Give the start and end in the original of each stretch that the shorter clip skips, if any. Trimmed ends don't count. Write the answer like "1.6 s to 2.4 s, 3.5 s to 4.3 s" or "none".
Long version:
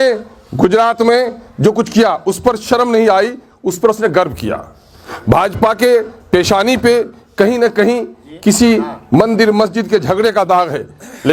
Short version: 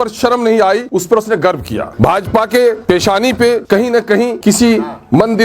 3.3 s to 3.6 s, 4.6 s to 5.2 s, 6.1 s to 6.2 s, 7.4 s to 7.9 s